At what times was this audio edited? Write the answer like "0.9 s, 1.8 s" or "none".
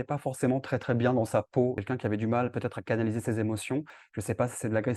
1.8 s, 4.0 s